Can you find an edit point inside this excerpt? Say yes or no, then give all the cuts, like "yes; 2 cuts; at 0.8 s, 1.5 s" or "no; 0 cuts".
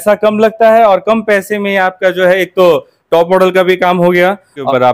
no; 0 cuts